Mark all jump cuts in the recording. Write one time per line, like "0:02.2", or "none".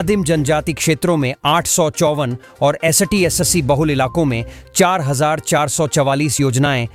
none